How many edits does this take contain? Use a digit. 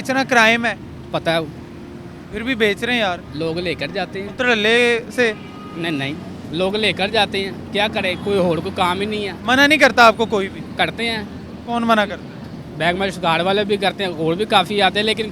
0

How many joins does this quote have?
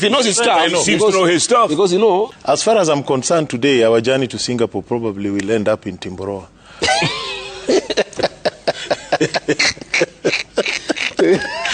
1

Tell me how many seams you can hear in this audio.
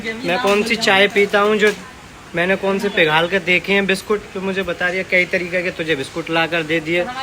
0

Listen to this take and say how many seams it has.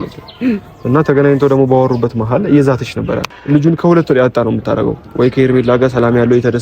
1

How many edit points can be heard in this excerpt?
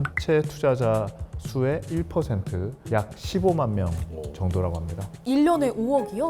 1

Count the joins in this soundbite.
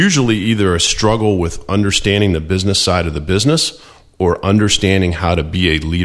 0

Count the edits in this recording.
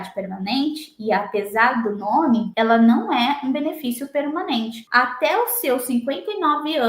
1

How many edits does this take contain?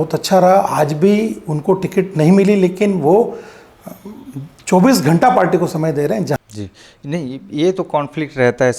1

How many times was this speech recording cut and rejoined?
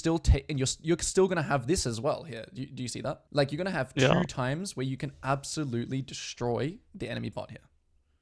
1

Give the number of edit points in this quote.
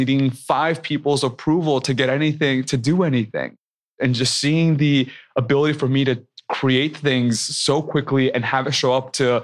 2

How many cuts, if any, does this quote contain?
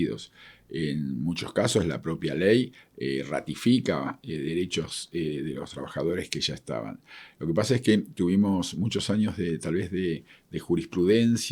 0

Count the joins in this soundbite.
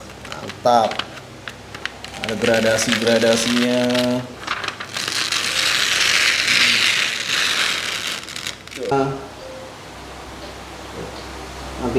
1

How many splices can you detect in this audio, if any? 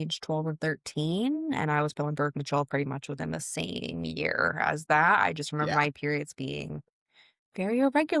0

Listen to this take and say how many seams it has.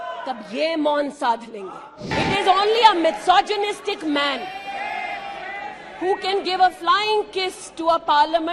1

